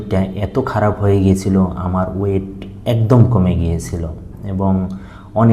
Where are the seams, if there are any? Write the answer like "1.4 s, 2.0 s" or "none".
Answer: none